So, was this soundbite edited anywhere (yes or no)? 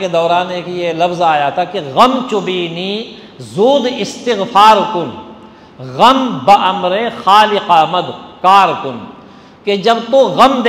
no